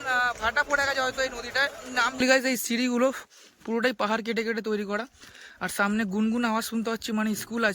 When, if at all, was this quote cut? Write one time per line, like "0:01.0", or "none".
0:01.8